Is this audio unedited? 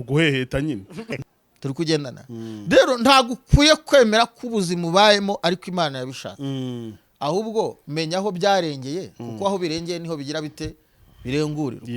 no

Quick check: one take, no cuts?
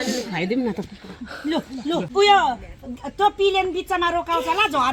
yes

